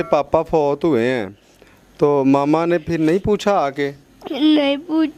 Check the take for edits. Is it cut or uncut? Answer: uncut